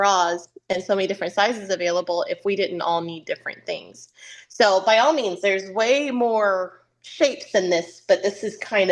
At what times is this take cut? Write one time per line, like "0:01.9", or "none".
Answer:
none